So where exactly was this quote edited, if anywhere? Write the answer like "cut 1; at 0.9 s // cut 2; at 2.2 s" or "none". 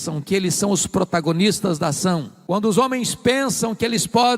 cut 1; at 2.3 s